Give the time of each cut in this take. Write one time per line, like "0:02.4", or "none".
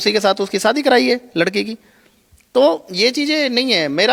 none